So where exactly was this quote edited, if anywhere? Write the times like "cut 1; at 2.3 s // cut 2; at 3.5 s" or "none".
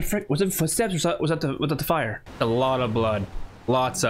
cut 1; at 2.2 s